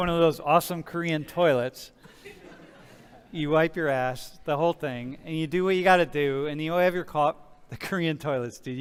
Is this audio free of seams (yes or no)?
yes